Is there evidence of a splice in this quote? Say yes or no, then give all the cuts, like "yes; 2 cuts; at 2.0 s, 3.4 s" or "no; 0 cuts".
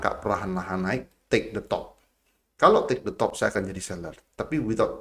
no; 0 cuts